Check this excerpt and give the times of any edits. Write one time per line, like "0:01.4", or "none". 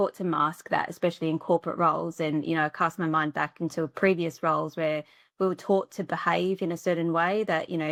none